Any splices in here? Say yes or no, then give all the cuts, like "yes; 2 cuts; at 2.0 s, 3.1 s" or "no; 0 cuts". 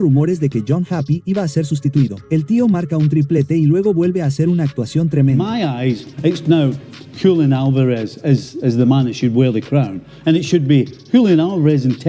yes; 1 cut; at 5.4 s